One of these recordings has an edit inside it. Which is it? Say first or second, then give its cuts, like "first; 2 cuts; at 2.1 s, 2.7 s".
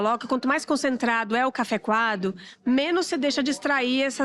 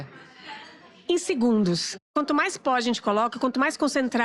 second; 1 cut; at 2.1 s